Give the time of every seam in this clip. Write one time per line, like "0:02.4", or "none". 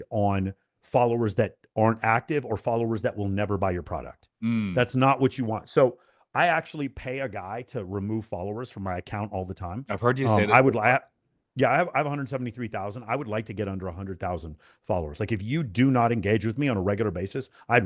none